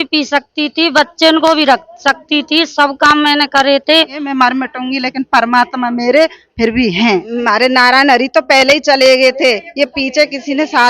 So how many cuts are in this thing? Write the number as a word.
two